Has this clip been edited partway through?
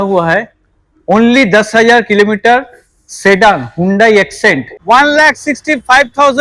yes; 1 cut; at 4.7 s

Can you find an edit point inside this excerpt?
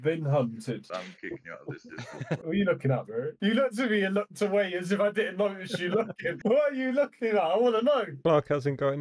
yes; 1 cut; at 2.4 s

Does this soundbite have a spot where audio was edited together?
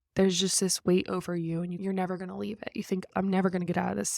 yes; 2 cuts; at 1.8 s, 3.1 s

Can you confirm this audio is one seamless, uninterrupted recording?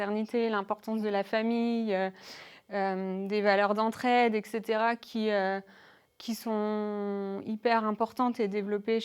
yes; 0 cuts

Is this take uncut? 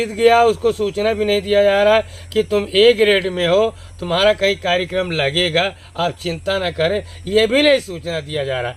yes; 0 cuts

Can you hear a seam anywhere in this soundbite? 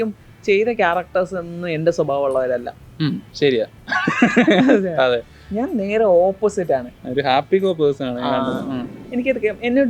yes; 1 cut; at 9.0 s

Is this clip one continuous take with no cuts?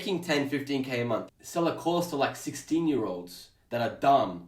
no; 1 cut; at 1.2 s

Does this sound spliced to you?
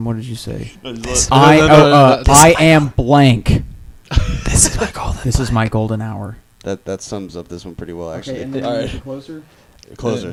no; 0 cuts

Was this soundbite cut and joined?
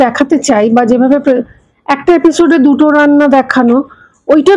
no; 0 cuts

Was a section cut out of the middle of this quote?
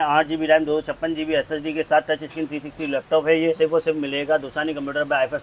no; 0 cuts

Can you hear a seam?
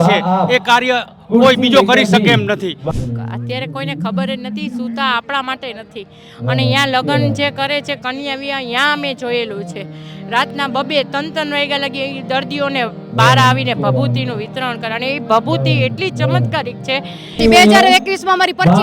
yes; 2 cuts; at 2.8 s, 17.4 s

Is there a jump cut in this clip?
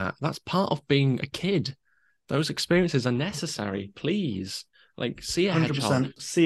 no; 0 cuts

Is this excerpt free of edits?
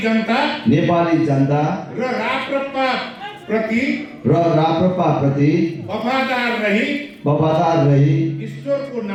yes; 0 cuts

